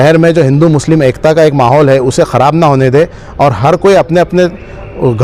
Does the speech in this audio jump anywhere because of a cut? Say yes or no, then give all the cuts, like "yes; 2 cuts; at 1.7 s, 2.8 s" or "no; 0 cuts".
no; 0 cuts